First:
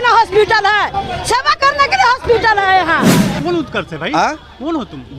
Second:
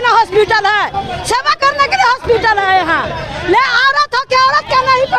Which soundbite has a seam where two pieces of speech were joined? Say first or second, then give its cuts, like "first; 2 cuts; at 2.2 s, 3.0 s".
first; 1 cut; at 3.3 s